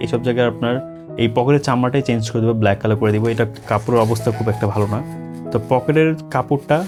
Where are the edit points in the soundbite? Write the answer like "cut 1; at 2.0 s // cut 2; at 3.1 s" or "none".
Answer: none